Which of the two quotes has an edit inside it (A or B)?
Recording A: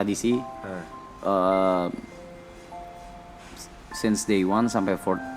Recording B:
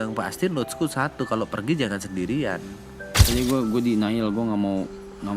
B